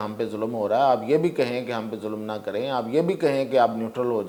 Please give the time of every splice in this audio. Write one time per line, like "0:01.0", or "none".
none

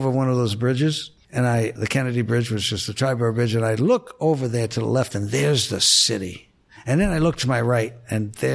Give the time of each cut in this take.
0:01.8

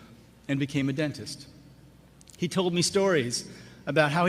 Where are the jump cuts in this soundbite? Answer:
none

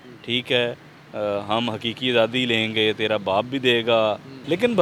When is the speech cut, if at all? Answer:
none

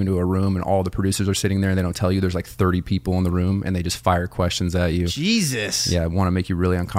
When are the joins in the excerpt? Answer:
none

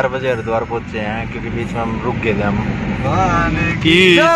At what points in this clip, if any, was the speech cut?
none

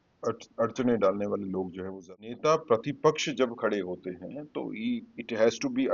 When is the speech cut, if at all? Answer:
0:01.9

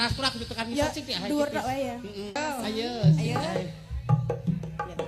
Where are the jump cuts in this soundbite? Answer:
0:02.4

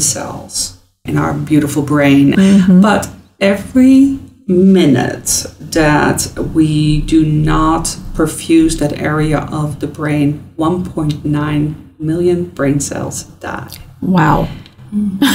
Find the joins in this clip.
0:01.1
0:02.3

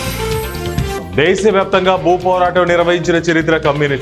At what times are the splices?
none

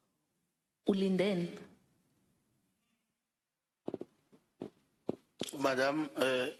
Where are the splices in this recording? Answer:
none

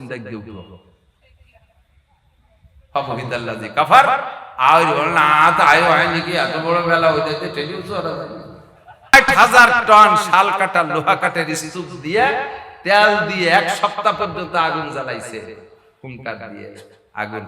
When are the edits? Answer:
0:09.1

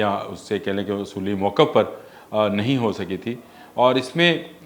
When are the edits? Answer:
none

